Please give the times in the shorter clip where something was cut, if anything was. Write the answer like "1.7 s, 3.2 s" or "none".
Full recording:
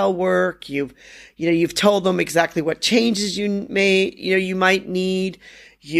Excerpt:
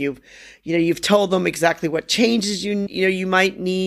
2.9 s